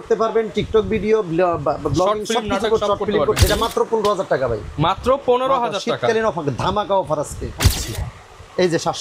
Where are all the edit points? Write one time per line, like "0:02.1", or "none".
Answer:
0:03.4
0:07.6